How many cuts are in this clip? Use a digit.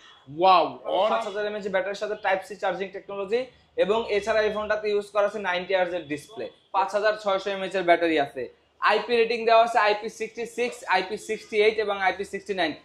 2